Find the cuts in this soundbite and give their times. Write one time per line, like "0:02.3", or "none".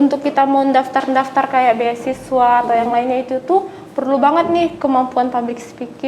none